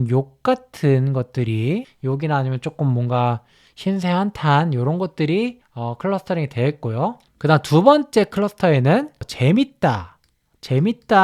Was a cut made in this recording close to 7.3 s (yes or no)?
yes